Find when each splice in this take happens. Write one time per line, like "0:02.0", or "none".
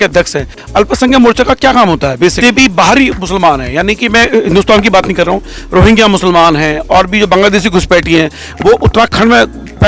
0:02.4